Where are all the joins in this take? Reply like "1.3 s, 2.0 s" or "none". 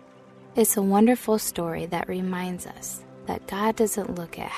none